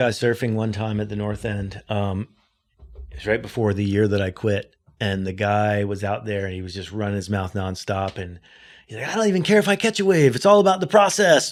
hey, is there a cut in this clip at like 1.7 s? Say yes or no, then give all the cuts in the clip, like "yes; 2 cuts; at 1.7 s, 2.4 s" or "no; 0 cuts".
no; 0 cuts